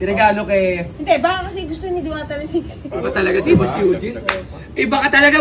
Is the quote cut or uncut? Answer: cut